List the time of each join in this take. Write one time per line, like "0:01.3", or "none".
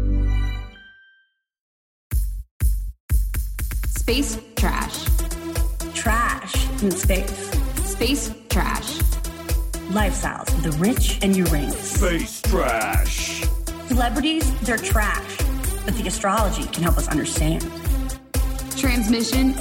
0:01.9